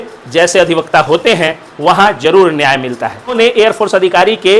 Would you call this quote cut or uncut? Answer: cut